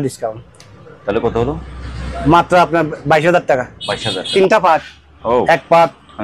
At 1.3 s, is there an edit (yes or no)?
no